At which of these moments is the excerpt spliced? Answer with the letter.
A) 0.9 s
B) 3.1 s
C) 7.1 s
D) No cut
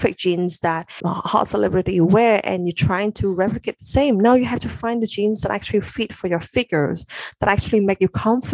A